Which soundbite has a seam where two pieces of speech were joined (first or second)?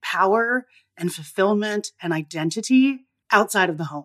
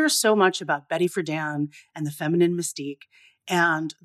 first